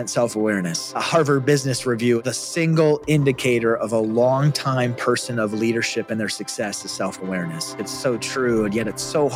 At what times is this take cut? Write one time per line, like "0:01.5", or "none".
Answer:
0:01.0
0:02.2
0:07.8